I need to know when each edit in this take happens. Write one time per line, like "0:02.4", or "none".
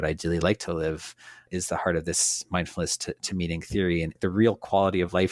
0:01.5
0:04.1